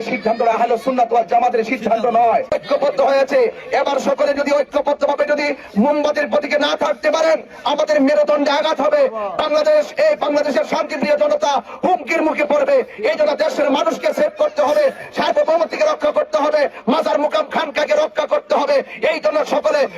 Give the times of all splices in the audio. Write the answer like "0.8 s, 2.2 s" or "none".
2.5 s